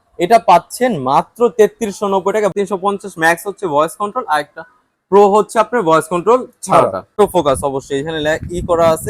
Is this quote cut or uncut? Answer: cut